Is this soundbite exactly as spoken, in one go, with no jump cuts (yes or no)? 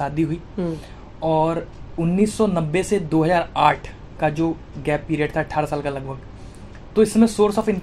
yes